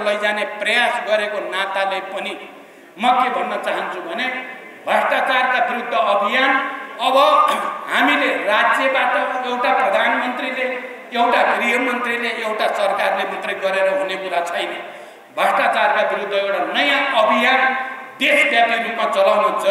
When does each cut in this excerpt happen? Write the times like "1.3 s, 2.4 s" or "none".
none